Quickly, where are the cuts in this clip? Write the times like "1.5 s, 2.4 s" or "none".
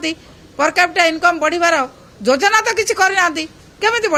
none